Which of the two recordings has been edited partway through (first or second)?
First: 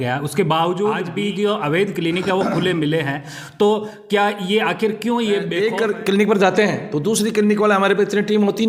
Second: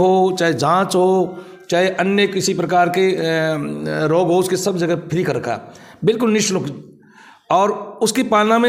first